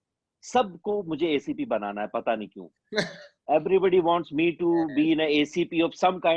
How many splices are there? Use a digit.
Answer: 0